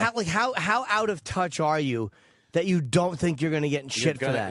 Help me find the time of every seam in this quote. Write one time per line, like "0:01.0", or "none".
0:01.1